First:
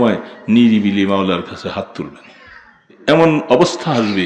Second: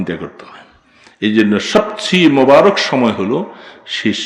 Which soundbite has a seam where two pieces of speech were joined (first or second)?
first